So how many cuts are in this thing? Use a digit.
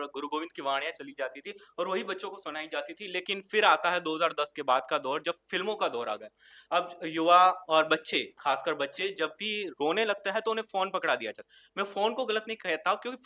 0